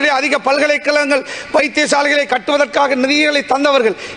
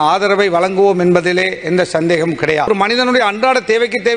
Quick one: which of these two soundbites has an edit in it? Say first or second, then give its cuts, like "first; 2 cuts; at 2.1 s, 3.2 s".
second; 1 cut; at 2.7 s